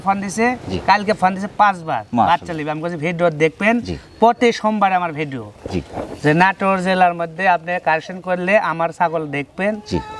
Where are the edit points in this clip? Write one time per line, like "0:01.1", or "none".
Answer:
none